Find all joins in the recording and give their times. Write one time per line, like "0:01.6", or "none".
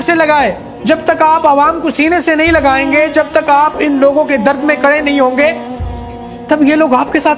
none